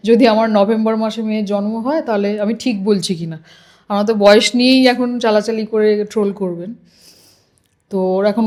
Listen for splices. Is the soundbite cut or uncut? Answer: uncut